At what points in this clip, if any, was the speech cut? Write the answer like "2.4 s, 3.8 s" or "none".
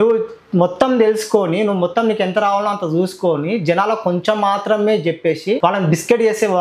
5.6 s